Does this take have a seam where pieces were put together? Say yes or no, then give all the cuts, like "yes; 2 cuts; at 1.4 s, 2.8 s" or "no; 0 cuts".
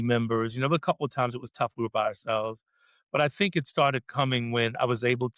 no; 0 cuts